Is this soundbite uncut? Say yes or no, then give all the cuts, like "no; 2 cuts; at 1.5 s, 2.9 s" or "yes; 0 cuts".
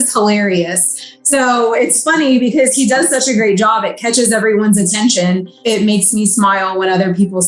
no; 1 cut; at 5.5 s